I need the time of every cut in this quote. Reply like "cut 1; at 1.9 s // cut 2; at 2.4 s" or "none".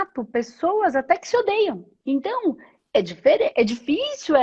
cut 1; at 1.9 s